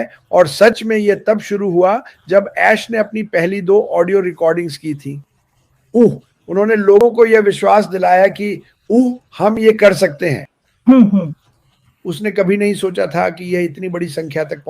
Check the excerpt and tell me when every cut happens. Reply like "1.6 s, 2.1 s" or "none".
none